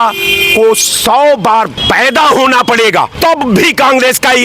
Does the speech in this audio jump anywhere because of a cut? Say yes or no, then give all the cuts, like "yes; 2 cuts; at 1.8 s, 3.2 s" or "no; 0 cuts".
no; 0 cuts